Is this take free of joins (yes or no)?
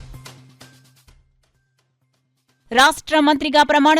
no